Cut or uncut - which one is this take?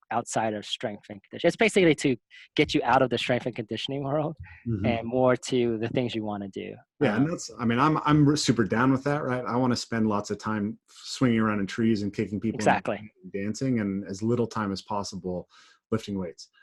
uncut